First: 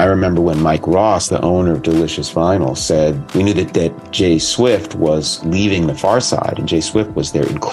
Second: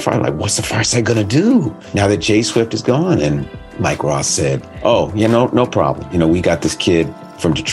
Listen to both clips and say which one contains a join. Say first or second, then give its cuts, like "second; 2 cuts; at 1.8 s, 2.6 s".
second; 4 cuts; at 1.8 s, 3.6 s, 4.7 s, 6.1 s